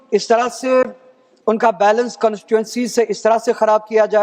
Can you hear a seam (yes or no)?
no